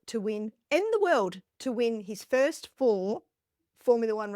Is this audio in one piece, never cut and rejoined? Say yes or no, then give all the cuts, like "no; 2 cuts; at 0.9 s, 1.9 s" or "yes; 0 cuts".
yes; 0 cuts